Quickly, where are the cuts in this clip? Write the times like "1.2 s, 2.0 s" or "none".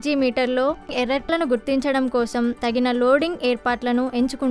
1.1 s, 2.6 s

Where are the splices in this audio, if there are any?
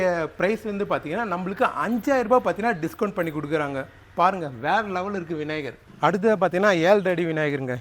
5.8 s

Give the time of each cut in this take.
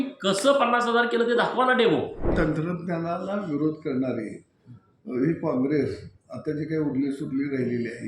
2.3 s

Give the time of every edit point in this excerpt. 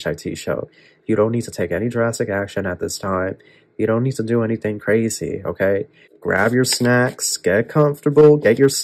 6.0 s

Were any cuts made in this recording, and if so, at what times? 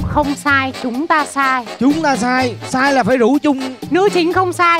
3.7 s

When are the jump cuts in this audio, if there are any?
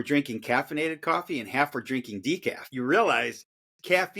2.7 s

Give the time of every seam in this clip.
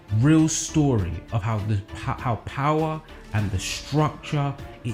none

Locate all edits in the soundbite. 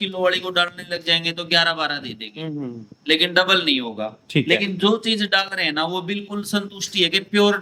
none

